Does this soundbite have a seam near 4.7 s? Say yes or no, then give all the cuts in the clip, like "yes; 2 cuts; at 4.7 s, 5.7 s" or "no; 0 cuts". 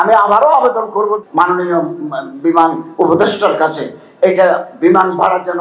no; 1 cut; at 1.2 s